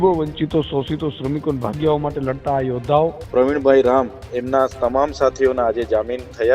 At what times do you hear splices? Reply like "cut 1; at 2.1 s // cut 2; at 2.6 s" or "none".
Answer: cut 1; at 3.2 s

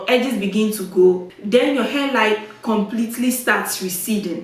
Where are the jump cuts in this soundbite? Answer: cut 1; at 1.3 s

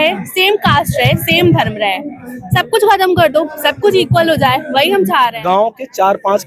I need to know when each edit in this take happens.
cut 1; at 5.4 s

